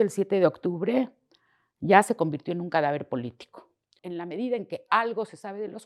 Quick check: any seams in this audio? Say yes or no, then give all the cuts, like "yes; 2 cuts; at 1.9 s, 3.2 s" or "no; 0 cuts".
yes; 1 cut; at 4.0 s